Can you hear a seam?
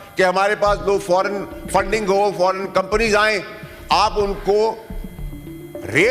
no; 0 cuts

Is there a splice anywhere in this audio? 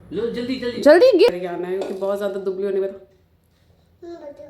yes; 1 cut; at 1.3 s

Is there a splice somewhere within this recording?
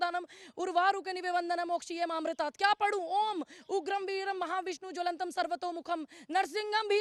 no; 0 cuts

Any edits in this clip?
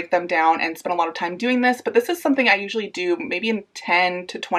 no; 0 cuts

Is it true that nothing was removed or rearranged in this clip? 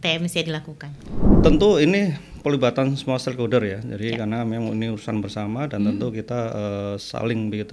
no; 1 cut; at 1.2 s

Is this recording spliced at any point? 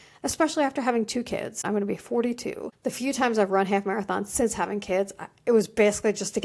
yes; 2 cuts; at 1.6 s, 2.7 s

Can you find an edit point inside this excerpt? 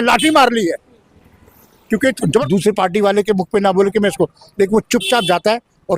yes; 1 cut; at 2.4 s

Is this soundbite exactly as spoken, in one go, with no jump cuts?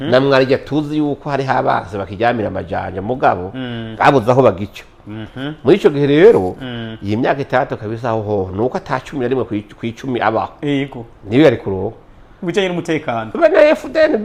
yes; 0 cuts

